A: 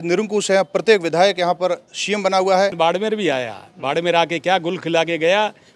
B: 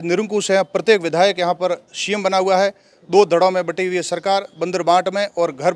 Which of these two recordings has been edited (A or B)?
A